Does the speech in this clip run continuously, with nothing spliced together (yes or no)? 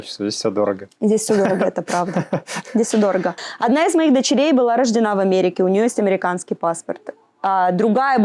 no